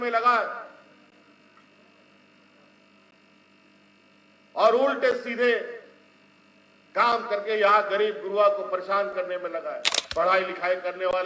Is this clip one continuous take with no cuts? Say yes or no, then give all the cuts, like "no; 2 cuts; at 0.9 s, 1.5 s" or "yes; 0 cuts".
no; 1 cut; at 9.9 s